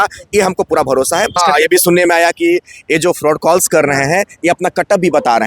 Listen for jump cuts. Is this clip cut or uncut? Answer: cut